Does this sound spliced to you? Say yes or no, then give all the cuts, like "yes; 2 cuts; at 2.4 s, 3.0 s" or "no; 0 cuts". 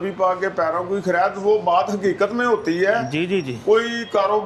no; 0 cuts